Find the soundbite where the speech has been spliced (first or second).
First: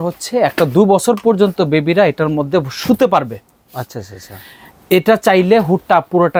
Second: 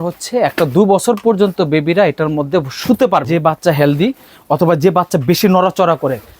second